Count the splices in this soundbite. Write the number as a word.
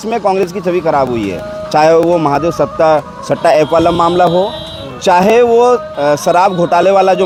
zero